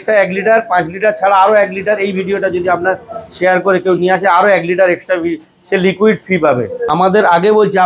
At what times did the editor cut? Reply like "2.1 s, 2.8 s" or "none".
6.9 s